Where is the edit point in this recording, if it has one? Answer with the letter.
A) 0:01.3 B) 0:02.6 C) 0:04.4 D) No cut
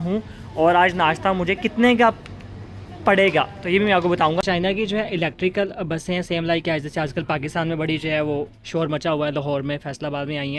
C